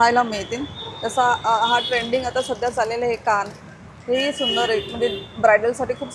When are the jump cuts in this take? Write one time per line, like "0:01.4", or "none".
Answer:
none